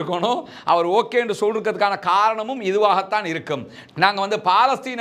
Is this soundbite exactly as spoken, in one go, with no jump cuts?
yes; 0 cuts

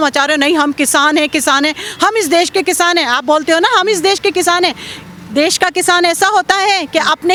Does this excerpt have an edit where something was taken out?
no; 0 cuts

